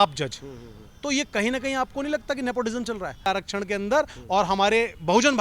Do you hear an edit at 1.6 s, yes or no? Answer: no